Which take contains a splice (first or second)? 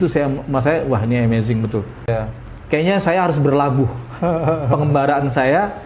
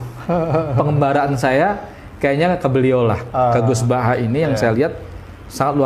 first